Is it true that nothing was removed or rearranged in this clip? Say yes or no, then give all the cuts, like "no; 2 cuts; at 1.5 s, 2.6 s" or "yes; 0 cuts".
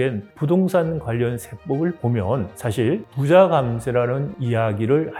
yes; 0 cuts